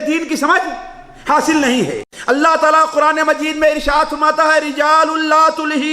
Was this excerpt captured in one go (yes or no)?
no